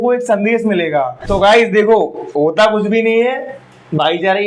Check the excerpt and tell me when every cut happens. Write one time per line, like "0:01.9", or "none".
0:01.2